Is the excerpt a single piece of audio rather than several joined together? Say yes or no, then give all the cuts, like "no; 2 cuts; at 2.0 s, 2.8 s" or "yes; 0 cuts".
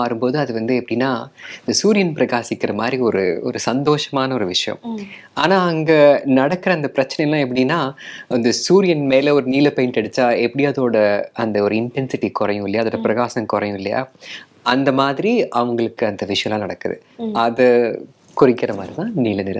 yes; 0 cuts